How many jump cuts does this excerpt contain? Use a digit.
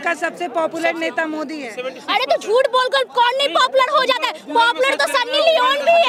0